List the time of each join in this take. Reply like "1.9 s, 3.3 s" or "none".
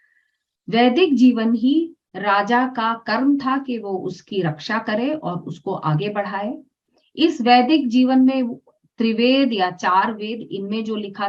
none

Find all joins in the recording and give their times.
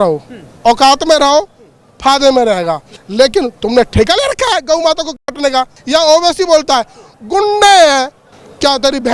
3.0 s, 5.8 s

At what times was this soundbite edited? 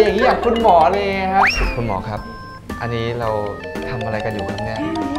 1.6 s

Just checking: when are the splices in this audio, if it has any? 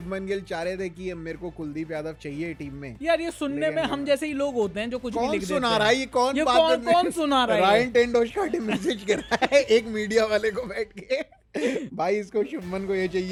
none

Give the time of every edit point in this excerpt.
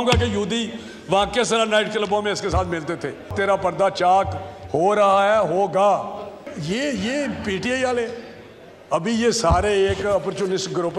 3.3 s, 6.5 s

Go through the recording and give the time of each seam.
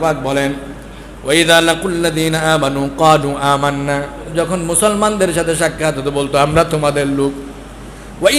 4.2 s

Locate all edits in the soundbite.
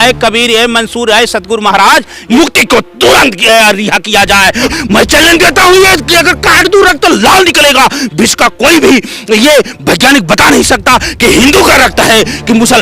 2.2 s, 4.7 s

